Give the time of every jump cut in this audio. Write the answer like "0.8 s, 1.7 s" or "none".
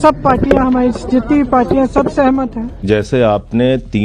2.8 s